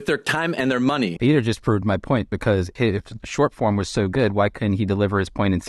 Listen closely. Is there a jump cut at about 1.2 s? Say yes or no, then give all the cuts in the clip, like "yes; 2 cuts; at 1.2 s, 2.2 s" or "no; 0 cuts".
yes; 2 cuts; at 1.2 s, 2.7 s